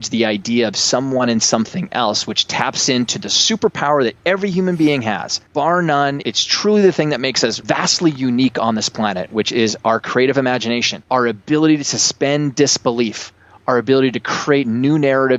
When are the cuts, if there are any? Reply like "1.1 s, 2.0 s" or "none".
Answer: 5.3 s, 6.2 s, 7.6 s, 10.9 s